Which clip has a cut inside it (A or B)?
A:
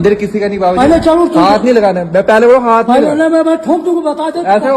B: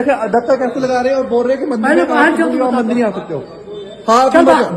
B